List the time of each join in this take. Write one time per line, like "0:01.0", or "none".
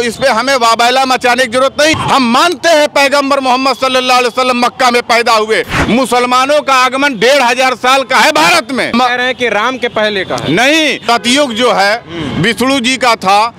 0:02.0
0:05.7
0:08.9
0:11.0